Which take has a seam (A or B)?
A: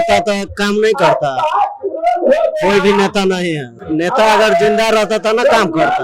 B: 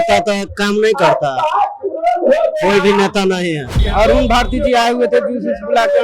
B